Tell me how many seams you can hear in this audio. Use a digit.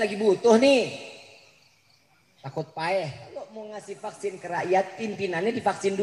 1